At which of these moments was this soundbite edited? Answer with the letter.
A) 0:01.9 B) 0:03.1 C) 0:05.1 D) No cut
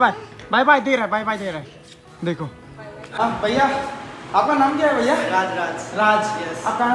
B